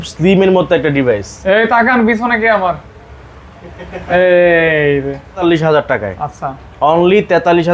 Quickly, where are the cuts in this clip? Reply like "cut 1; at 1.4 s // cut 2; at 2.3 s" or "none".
cut 1; at 5.4 s